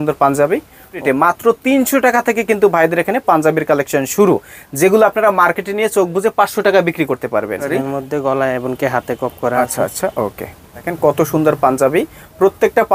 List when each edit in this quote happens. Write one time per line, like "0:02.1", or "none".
0:01.0
0:07.6
0:10.8